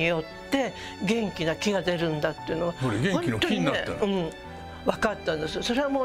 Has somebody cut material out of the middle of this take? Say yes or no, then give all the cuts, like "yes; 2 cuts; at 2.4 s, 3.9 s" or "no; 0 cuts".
no; 0 cuts